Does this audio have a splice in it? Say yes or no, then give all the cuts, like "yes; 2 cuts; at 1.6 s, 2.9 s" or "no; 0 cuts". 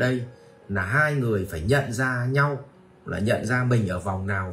no; 0 cuts